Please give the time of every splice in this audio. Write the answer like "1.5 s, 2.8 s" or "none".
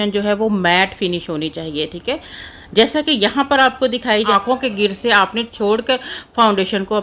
4.3 s